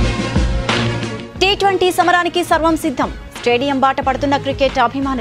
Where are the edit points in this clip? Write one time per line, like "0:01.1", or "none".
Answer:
none